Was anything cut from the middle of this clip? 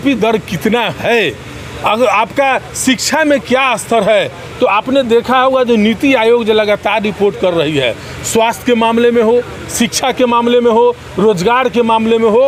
no; 0 cuts

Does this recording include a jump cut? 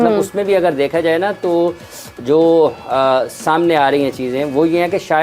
no; 0 cuts

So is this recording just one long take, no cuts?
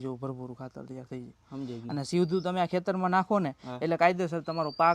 yes; 0 cuts

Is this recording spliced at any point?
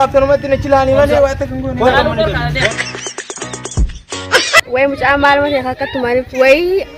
no; 0 cuts

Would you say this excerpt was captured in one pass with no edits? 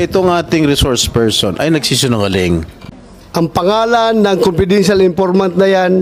no; 1 cut; at 2.7 s

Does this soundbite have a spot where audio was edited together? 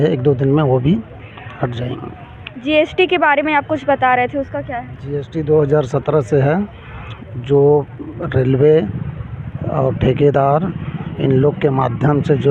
no; 0 cuts

